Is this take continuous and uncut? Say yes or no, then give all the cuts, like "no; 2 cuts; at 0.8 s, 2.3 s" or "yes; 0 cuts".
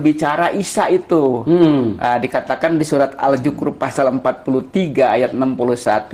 yes; 0 cuts